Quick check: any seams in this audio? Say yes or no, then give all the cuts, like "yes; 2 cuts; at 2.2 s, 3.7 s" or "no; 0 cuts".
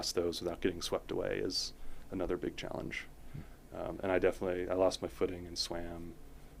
no; 0 cuts